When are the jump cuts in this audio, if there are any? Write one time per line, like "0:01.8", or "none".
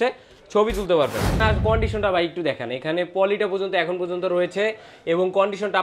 0:01.4